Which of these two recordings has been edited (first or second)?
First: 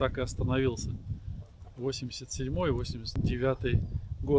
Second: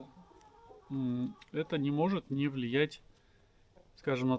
first